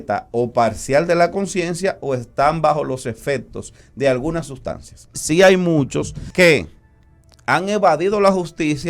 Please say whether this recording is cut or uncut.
cut